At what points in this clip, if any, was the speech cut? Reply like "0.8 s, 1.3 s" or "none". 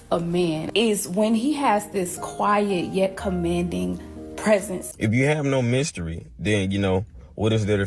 4.9 s